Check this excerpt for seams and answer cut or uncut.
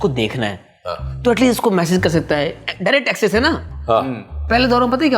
cut